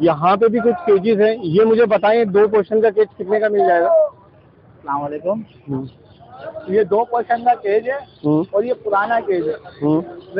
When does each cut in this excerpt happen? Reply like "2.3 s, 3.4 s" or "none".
none